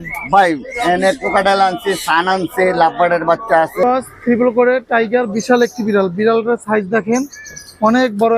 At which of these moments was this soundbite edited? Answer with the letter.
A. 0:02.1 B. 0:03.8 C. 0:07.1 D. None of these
B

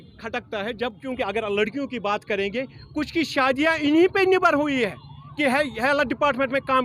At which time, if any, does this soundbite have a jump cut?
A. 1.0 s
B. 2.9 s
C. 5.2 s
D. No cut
A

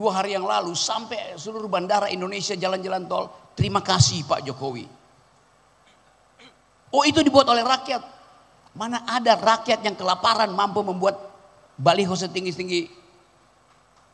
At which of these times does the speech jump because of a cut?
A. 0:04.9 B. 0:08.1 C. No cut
C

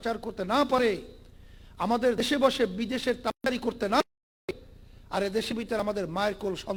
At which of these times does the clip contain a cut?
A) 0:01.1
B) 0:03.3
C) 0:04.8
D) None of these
D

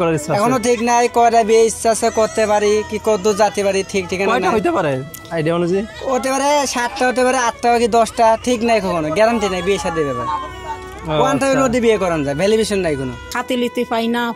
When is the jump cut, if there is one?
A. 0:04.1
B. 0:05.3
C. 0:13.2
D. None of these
C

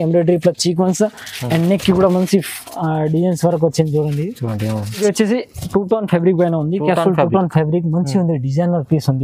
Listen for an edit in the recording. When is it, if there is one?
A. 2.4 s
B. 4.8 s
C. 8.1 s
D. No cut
B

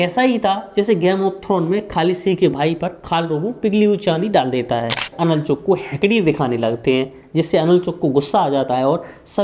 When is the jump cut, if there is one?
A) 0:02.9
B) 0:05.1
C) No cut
B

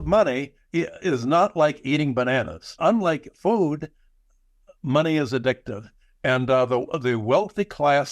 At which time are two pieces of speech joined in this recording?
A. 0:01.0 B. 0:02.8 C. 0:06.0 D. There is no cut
B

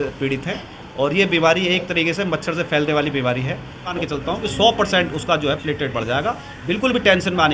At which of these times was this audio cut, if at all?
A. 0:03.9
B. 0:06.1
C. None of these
A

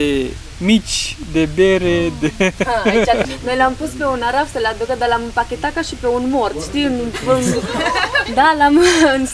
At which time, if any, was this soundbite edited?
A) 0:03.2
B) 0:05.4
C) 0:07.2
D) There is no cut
A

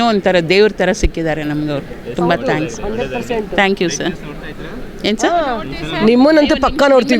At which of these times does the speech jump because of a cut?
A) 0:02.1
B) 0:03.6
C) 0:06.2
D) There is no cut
D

